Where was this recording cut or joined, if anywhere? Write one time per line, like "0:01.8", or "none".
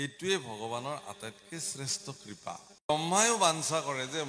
0:02.9